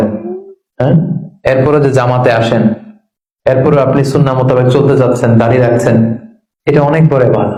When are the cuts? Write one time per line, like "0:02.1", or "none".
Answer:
none